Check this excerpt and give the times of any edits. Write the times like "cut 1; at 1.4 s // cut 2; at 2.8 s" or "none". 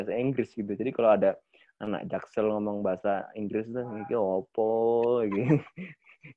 none